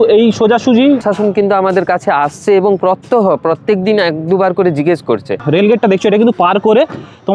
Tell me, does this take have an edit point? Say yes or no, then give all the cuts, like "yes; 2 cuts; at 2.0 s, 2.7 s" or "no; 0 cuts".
yes; 2 cuts; at 1.0 s, 5.4 s